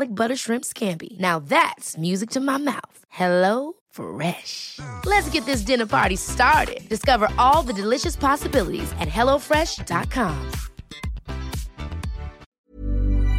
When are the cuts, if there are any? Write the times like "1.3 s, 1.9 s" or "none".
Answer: 12.5 s